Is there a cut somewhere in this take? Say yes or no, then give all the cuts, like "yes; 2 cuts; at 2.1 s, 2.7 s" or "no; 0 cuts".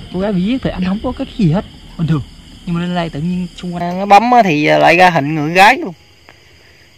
yes; 1 cut; at 3.9 s